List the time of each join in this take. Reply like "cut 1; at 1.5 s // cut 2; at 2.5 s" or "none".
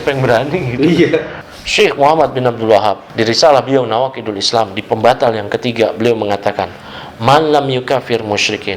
cut 1; at 1.4 s // cut 2; at 3.1 s